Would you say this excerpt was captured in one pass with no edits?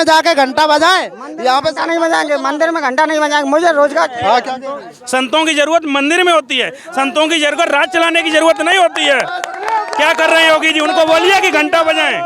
yes; 0 cuts

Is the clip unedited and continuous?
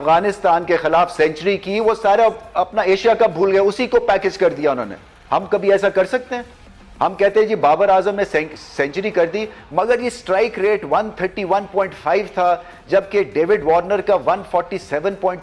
yes; 0 cuts

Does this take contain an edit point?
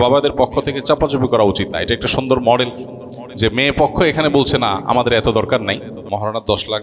yes; 1 cut; at 5.9 s

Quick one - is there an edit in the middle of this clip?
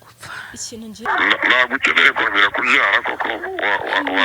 yes; 1 cut; at 1.0 s

